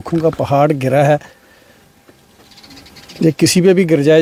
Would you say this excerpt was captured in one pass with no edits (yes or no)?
yes